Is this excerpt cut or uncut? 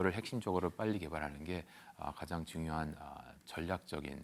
uncut